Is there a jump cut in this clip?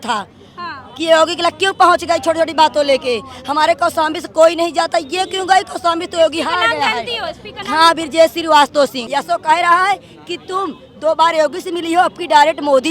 yes; 1 cut; at 9.0 s

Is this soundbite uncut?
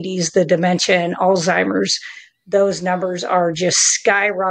yes; 0 cuts

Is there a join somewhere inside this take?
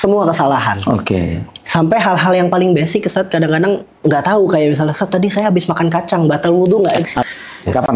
yes; 1 cut; at 7.0 s

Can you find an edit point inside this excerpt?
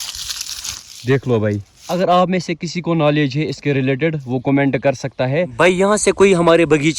yes; 1 cut; at 5.5 s

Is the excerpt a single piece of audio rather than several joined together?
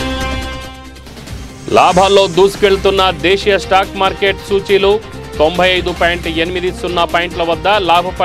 no; 1 cut; at 1.5 s

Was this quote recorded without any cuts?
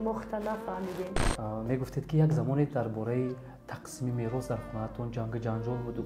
no; 1 cut; at 1.2 s

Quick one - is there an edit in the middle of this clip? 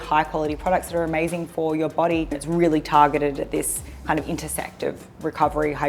yes; 1 cut; at 2.4 s

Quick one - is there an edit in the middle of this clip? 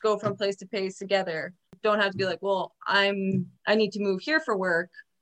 yes; 1 cut; at 1.6 s

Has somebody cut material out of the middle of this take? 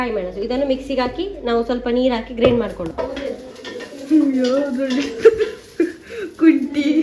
yes; 1 cut; at 3.3 s

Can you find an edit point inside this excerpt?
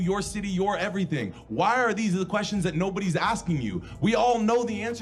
no; 0 cuts

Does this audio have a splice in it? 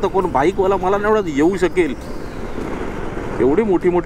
no; 0 cuts

